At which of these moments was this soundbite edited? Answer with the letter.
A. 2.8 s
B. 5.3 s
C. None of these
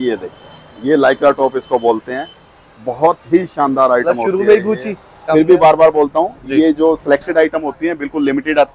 B